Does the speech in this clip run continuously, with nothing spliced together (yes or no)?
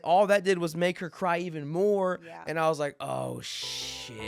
yes